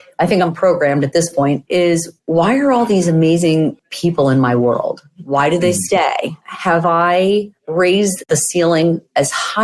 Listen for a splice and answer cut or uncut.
cut